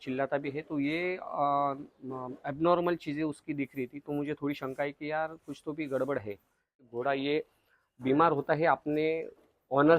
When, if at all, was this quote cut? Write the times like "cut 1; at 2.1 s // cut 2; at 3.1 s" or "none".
cut 1; at 6.9 s